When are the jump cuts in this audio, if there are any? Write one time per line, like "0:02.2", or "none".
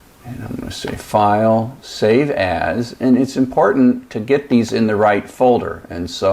0:00.8
0:05.1